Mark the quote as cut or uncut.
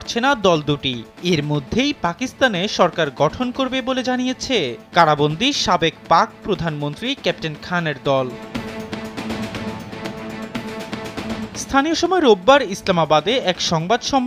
uncut